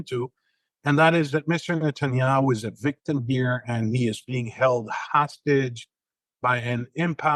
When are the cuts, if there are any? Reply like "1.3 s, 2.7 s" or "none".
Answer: none